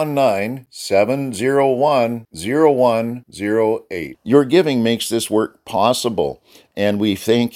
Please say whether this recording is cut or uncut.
uncut